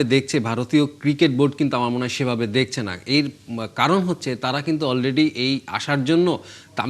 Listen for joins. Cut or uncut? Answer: uncut